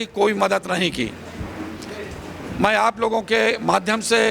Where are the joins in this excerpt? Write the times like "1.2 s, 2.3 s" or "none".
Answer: none